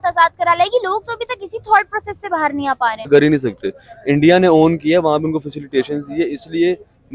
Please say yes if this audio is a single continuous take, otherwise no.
no